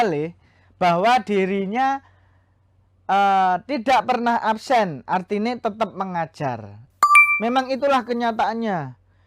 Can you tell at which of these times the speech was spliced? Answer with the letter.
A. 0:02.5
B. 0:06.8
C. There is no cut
B